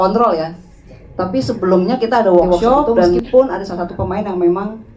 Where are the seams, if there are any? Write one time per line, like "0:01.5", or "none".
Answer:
0:03.2